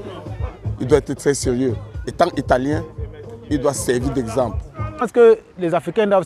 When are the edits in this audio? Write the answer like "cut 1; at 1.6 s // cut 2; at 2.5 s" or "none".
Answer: cut 1; at 5.1 s